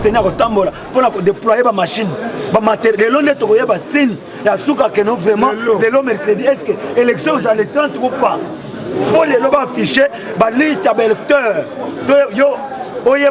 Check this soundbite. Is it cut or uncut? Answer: uncut